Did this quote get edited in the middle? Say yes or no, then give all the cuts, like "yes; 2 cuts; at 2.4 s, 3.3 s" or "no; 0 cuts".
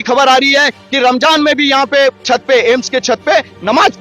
no; 0 cuts